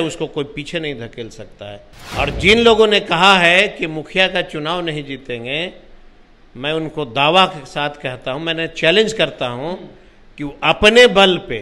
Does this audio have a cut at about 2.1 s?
yes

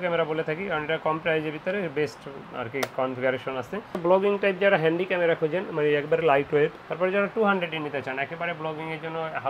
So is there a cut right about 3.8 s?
yes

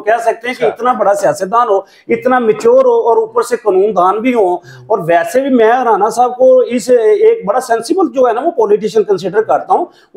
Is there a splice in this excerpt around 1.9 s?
no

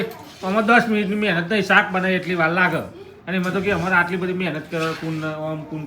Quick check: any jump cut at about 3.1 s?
no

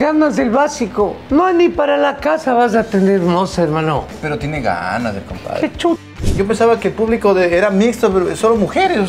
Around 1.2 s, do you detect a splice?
yes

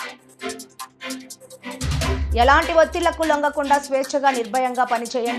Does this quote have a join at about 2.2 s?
yes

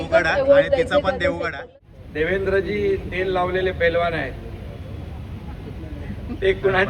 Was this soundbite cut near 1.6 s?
yes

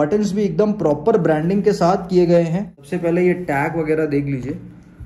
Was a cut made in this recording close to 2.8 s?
yes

